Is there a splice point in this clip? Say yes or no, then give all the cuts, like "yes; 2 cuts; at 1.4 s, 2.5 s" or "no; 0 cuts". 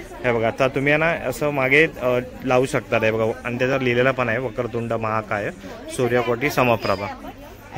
no; 0 cuts